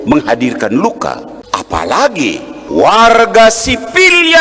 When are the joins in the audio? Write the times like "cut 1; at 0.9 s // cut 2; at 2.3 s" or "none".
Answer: cut 1; at 1.3 s // cut 2; at 2.5 s